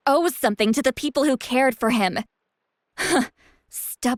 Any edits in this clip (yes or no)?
no